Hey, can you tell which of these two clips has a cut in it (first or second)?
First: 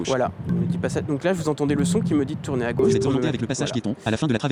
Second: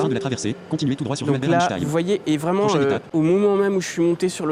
second